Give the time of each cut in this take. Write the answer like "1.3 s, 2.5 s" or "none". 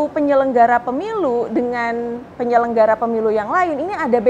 none